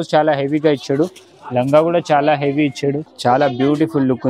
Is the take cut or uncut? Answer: cut